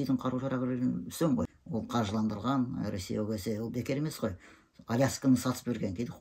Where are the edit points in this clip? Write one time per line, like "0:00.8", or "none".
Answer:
0:01.6